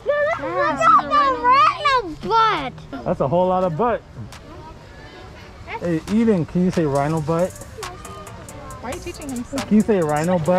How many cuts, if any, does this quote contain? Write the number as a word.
one